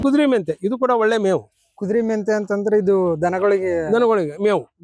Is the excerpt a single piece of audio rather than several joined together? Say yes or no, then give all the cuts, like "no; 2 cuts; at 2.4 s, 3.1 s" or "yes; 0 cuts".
yes; 0 cuts